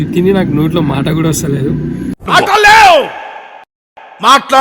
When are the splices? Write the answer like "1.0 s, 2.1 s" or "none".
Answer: none